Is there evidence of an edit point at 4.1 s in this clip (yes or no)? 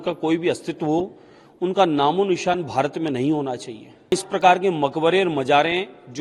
yes